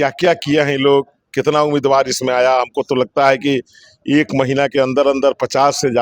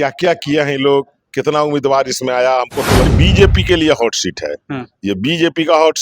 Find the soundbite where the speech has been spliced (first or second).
second